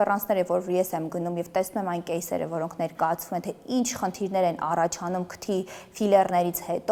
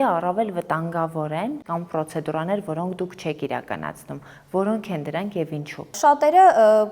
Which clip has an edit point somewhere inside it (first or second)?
second